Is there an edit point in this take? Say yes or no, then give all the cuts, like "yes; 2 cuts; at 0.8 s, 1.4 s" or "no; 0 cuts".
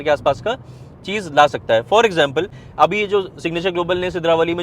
yes; 1 cut; at 2.6 s